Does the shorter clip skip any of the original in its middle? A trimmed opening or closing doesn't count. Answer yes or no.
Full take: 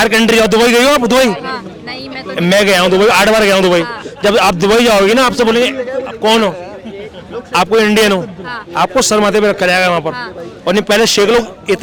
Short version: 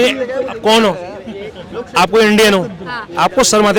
no